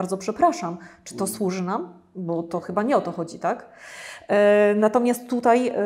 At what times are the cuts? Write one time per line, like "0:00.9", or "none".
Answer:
none